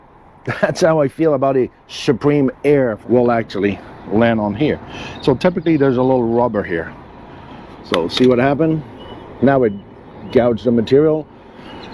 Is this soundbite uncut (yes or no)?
no